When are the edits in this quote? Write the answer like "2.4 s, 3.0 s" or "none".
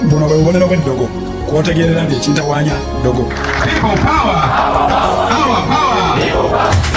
none